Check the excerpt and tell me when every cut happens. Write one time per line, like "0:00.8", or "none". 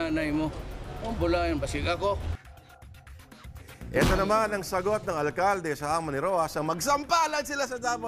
0:03.6